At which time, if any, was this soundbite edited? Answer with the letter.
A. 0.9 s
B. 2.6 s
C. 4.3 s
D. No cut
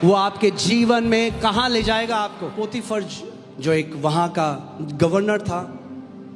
B